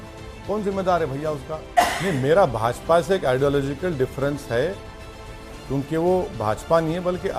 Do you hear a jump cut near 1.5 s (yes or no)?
yes